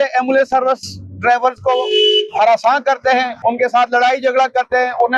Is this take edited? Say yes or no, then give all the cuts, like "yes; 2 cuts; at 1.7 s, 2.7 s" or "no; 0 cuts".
yes; 1 cut; at 3.3 s